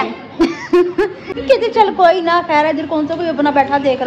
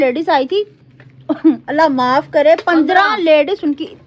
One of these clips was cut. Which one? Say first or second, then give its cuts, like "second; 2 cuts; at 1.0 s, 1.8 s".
first; 1 cut; at 1.3 s